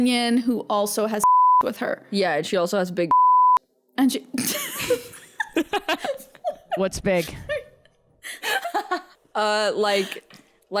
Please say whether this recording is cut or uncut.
cut